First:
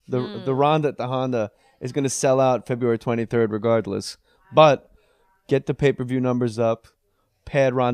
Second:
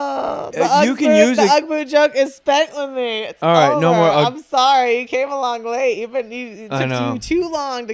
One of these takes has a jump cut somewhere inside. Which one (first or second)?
first